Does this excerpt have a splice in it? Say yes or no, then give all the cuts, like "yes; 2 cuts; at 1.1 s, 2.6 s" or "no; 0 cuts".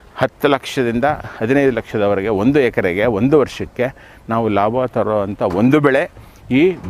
no; 0 cuts